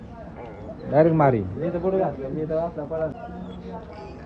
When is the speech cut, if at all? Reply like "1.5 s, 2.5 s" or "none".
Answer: 3.2 s

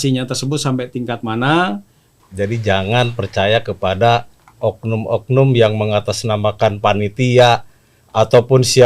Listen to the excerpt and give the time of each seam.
2.3 s

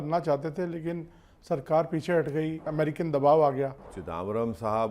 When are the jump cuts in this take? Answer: 2.7 s, 4.0 s

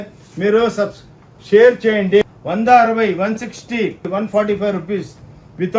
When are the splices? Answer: 2.2 s, 4.1 s

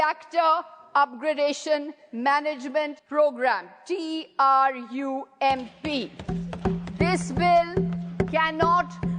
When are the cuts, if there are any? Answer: 3.0 s

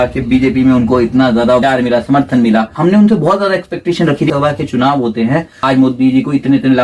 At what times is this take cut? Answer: 1.6 s, 2.7 s, 4.3 s, 5.6 s

